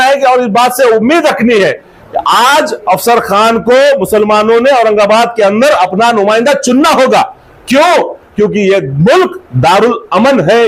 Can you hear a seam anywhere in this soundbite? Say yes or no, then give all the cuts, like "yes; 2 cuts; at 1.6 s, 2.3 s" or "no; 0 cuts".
no; 0 cuts